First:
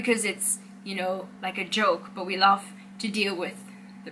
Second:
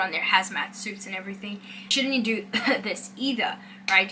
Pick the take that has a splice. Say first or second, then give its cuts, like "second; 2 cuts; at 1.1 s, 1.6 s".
second; 1 cut; at 1.9 s